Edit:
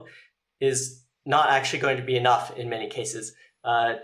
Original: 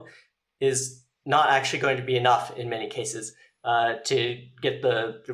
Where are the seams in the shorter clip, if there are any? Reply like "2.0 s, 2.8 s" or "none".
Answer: none

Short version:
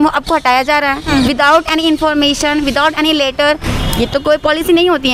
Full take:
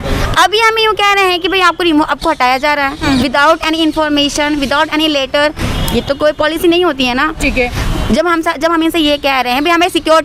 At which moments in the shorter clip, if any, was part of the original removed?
none

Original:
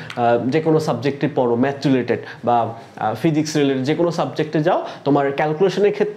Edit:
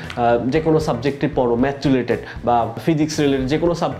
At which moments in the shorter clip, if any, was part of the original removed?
2.8 s

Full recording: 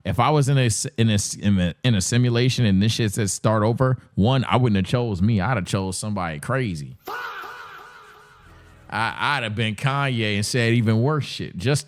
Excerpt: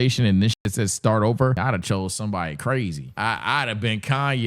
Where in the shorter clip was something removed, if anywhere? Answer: 1.6 s, 3.0 s

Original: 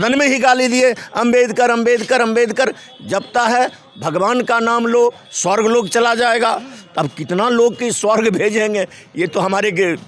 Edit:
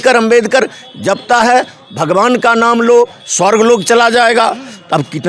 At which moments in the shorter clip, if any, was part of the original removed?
none

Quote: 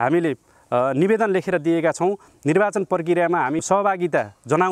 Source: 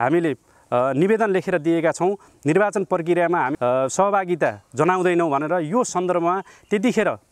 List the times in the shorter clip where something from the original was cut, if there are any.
3.6 s

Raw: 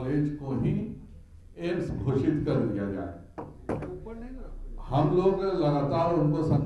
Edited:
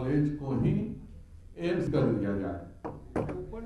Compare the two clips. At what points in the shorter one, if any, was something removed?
1.9 s

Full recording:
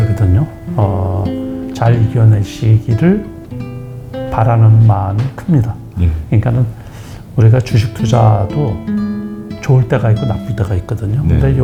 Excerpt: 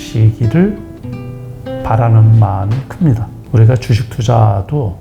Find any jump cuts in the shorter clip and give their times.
3.3 s

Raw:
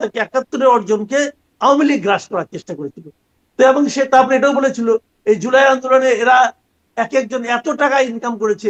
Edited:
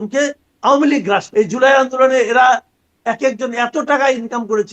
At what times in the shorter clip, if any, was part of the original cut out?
1.3 s

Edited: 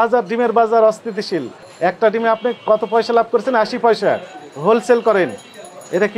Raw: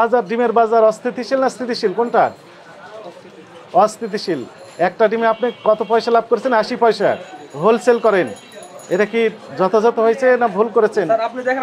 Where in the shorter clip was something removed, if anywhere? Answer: 1.1 s

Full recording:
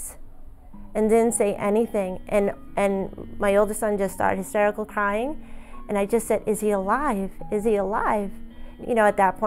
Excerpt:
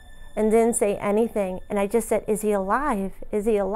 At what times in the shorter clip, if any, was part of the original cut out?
1.6 s

